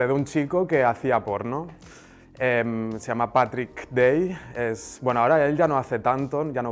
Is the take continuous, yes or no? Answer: yes